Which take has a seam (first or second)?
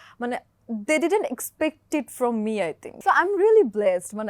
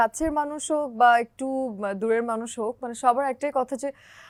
first